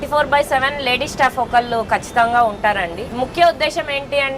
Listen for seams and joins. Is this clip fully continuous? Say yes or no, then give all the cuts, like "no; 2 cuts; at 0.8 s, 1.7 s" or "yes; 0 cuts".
no; 1 cut; at 3.0 s